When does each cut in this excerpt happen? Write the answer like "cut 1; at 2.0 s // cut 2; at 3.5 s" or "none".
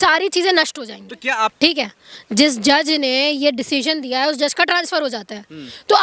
cut 1; at 1.5 s

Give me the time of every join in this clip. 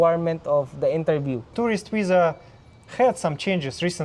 cut 1; at 1.5 s

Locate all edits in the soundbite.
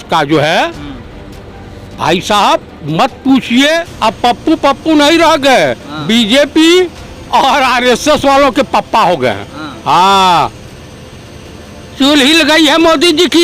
cut 1; at 3.9 s

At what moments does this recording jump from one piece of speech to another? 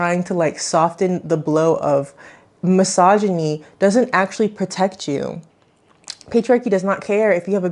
cut 1; at 5.4 s

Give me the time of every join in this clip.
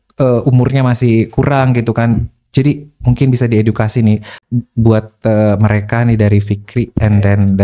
none

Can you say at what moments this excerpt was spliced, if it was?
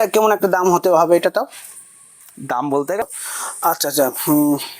cut 1; at 3.0 s

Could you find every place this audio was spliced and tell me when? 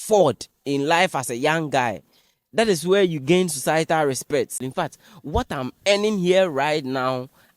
cut 1; at 4.6 s

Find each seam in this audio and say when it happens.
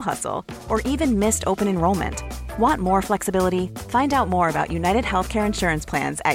none

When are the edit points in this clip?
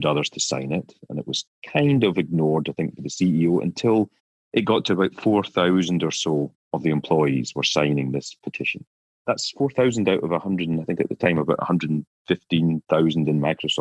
none

